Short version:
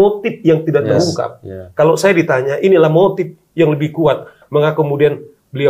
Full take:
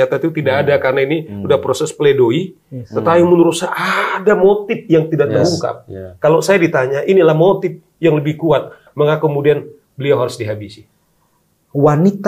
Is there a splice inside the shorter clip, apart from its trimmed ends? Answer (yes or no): no